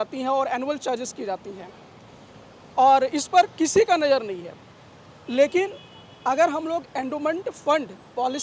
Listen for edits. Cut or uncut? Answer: uncut